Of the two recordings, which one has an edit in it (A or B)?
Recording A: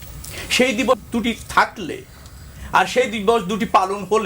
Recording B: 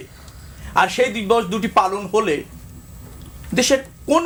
A